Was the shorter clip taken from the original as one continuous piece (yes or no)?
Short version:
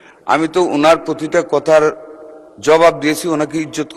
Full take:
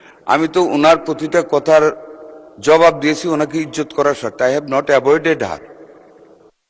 yes